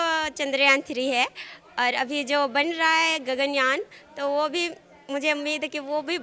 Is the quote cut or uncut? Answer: uncut